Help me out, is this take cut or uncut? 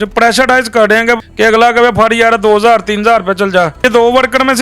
cut